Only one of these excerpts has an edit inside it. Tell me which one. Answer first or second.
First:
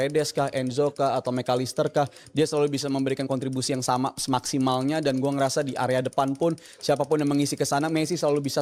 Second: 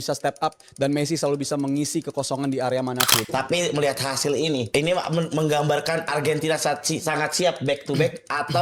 second